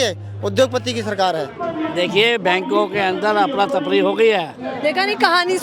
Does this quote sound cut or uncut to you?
cut